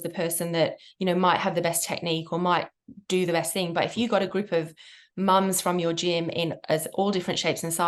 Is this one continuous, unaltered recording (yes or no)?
yes